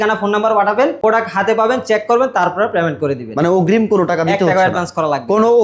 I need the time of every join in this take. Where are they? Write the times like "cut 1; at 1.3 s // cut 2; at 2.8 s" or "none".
cut 1; at 1.0 s